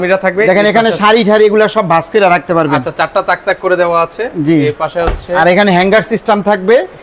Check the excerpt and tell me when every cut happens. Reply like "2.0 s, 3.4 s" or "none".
none